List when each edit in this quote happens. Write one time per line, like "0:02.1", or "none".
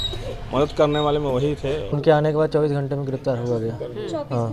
0:02.0